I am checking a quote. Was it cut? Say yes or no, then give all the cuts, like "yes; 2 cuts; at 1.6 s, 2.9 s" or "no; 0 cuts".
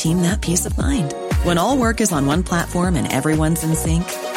no; 0 cuts